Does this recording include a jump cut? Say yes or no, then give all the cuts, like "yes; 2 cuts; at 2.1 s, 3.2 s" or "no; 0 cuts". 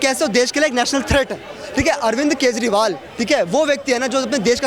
no; 0 cuts